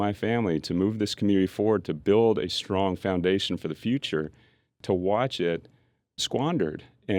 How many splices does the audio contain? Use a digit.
2